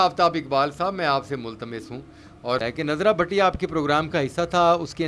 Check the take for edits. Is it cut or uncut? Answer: cut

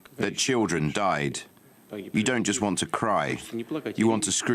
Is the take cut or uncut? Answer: cut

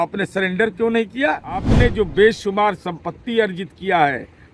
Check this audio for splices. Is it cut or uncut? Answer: cut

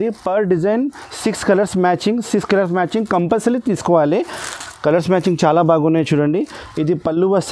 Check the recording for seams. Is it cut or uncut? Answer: uncut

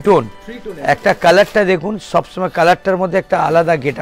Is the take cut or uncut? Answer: uncut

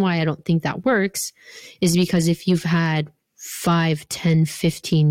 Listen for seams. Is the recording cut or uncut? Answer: uncut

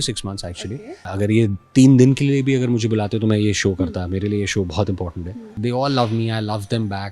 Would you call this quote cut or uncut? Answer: cut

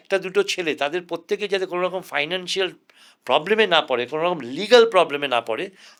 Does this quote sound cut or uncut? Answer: uncut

